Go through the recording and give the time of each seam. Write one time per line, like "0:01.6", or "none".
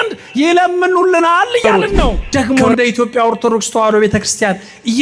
0:02.2